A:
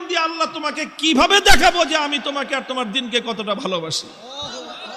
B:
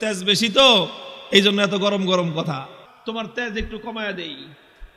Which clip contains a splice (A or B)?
B